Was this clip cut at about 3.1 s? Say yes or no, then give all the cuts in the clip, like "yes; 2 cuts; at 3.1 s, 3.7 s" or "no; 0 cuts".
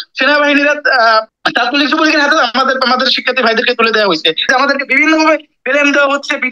no; 2 cuts; at 1.4 s, 4.5 s